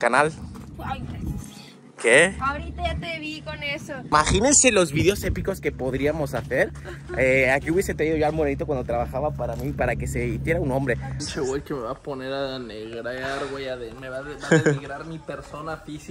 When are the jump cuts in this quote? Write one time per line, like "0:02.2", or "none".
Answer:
0:04.1
0:11.2

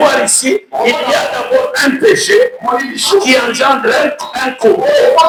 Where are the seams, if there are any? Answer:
none

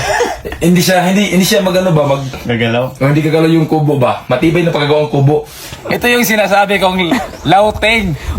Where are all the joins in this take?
0:02.4
0:05.7

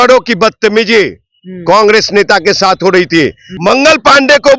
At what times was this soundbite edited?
0:03.5

